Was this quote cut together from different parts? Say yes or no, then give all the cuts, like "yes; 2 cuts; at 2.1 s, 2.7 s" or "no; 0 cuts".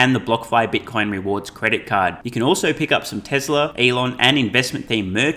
yes; 1 cut; at 3.7 s